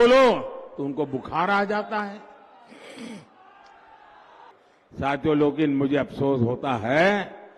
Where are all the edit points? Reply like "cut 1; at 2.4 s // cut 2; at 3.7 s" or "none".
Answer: cut 1; at 4.5 s

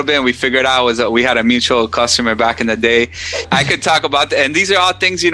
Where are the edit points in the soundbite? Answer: cut 1; at 3.4 s

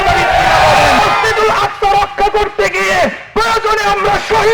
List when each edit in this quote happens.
cut 1; at 1.0 s

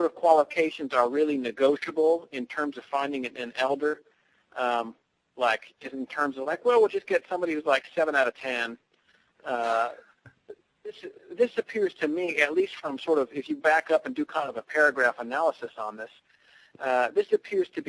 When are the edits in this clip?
cut 1; at 7.0 s

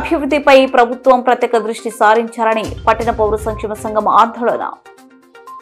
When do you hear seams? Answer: none

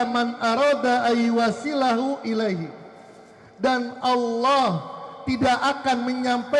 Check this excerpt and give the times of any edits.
none

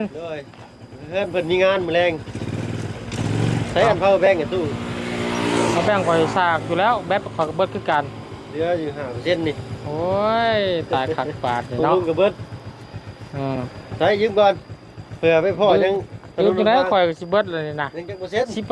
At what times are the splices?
none

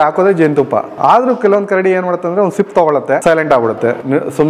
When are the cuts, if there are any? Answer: cut 1; at 0.9 s // cut 2; at 3.2 s

